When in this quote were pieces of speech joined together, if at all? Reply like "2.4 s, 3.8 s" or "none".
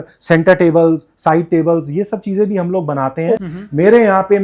3.4 s